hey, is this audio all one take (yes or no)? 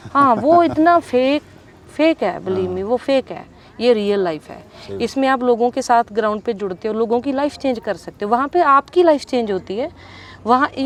yes